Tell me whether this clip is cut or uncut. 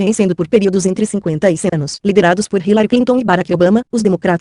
cut